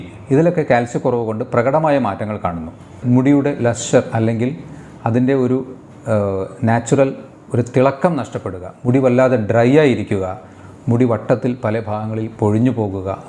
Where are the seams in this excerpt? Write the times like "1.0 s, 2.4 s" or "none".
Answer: 3.0 s